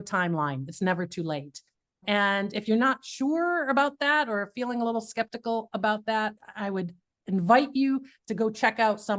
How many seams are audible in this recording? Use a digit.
2